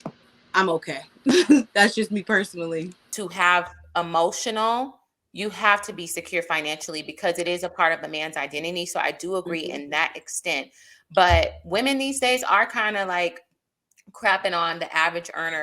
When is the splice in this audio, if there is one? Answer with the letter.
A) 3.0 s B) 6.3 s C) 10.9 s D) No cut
A